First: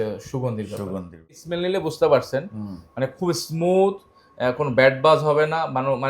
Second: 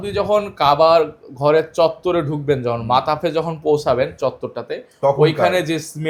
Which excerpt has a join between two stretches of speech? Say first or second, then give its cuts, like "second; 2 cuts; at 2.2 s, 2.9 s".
first; 1 cut; at 1.4 s